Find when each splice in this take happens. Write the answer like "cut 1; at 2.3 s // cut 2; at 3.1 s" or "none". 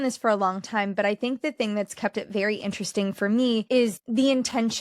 cut 1; at 3.8 s